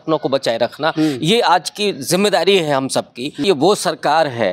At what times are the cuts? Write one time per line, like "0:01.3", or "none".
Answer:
0:03.4